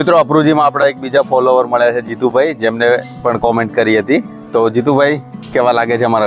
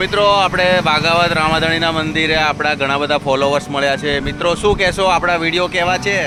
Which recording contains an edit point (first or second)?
first